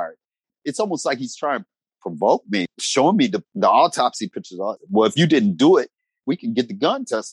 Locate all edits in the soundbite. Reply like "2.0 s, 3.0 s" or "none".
1.9 s, 2.7 s, 3.4 s, 4.8 s, 6.2 s